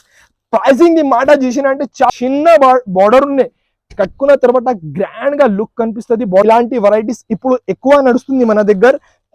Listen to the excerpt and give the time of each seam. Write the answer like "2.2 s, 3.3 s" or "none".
2.1 s, 6.4 s